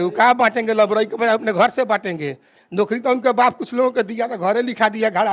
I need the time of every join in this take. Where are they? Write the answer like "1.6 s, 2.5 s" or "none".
none

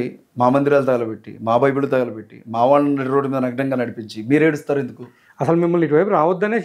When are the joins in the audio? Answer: none

